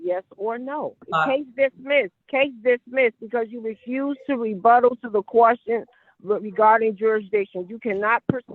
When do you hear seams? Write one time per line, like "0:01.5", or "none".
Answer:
0:01.0
0:02.2